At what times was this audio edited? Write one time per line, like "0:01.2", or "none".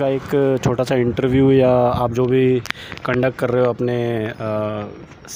none